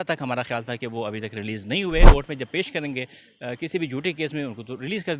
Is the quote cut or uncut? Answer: cut